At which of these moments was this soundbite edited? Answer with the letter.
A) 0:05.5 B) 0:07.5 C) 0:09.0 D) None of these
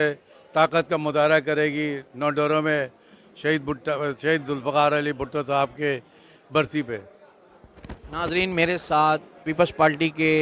D